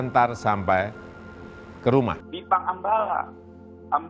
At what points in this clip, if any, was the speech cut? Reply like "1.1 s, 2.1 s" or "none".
2.3 s